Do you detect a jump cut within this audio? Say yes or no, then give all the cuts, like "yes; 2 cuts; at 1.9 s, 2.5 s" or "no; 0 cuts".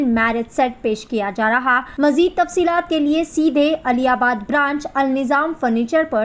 yes; 1 cut; at 1.9 s